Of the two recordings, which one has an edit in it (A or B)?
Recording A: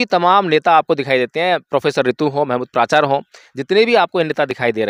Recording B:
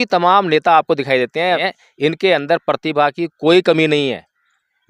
B